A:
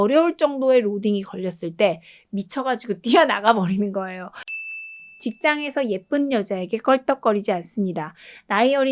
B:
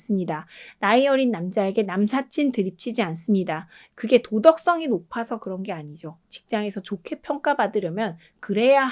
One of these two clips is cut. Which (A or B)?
A